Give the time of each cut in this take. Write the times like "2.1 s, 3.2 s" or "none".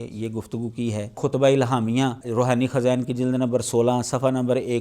1.2 s, 2.2 s